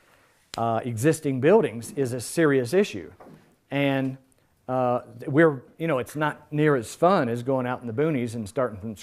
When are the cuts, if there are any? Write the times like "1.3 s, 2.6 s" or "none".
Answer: 5.1 s